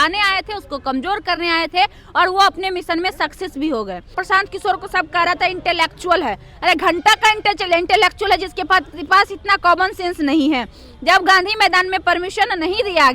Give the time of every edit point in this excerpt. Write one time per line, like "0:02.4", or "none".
0:04.2